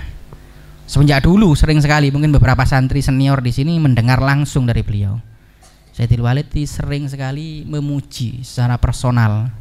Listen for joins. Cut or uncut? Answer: uncut